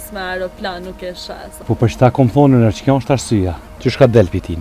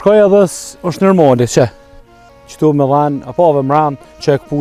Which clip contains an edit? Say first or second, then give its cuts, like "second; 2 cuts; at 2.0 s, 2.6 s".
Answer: first; 2 cuts; at 1.6 s, 3.6 s